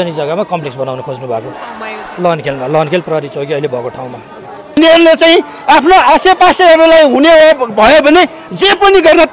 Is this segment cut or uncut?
cut